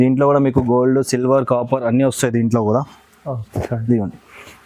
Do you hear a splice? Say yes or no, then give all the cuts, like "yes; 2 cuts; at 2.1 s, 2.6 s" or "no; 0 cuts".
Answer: no; 0 cuts